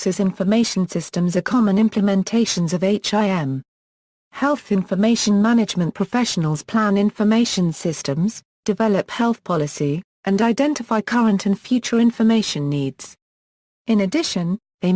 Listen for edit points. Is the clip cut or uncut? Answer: cut